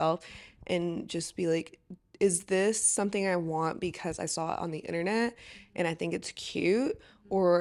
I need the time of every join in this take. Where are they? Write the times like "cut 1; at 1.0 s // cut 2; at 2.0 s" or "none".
none